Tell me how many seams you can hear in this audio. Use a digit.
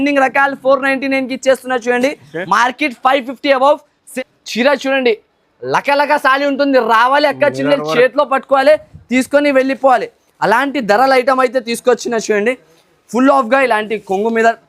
1